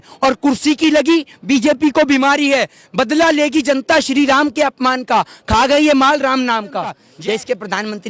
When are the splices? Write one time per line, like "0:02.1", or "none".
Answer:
0:07.1